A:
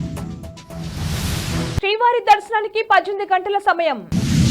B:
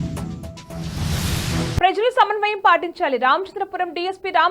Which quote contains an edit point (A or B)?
A